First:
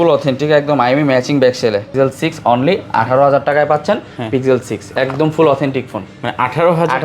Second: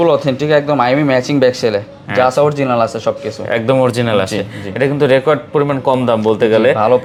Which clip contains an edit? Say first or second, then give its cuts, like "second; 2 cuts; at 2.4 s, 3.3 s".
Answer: first; 1 cut; at 1.9 s